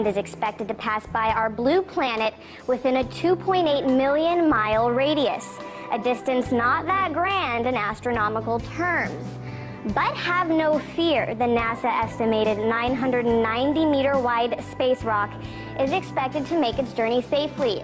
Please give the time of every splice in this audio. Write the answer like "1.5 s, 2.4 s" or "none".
6.2 s